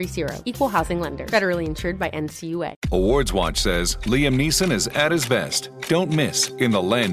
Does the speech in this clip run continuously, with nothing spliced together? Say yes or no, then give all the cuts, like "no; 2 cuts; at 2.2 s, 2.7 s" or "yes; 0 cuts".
no; 1 cut; at 2.8 s